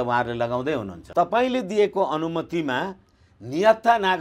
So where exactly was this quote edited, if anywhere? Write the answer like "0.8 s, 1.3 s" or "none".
0.9 s